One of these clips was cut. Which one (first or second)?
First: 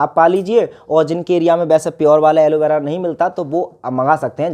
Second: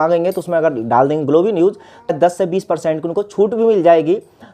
second